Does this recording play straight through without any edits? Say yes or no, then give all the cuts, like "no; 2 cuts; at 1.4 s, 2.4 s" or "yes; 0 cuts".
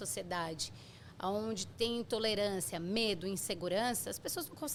yes; 0 cuts